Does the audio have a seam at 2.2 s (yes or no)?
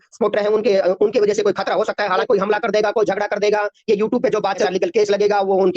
yes